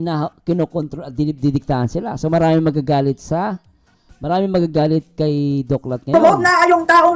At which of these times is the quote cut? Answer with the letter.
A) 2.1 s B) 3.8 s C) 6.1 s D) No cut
C